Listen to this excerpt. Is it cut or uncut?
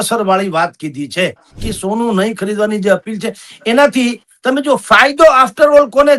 cut